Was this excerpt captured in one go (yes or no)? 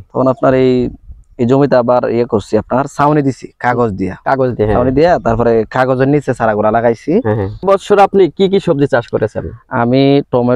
no